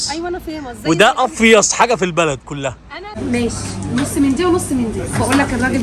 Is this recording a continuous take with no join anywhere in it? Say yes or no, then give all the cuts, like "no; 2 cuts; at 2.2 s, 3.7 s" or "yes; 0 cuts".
no; 1 cut; at 3.1 s